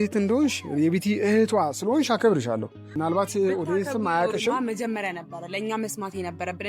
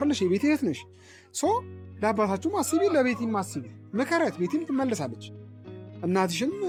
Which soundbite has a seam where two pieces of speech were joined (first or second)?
first